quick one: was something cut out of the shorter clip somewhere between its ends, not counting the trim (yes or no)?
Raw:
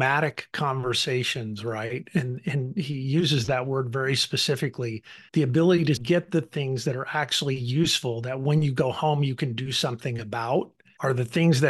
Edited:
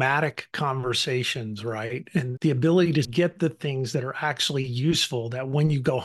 yes